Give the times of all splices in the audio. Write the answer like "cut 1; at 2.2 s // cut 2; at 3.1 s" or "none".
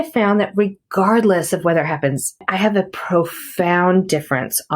cut 1; at 2.5 s